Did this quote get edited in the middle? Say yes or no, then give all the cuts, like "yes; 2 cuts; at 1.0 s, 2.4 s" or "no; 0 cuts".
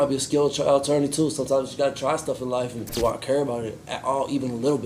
yes; 1 cut; at 2.9 s